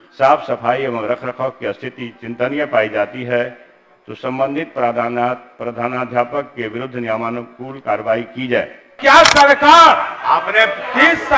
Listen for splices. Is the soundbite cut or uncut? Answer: cut